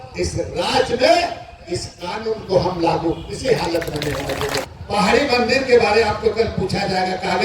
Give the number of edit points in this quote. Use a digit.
1